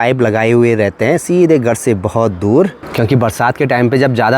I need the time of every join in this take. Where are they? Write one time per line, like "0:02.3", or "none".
none